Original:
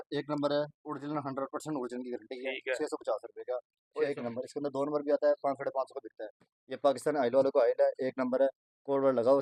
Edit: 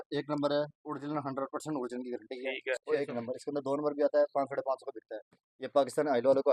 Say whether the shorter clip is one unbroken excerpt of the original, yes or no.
no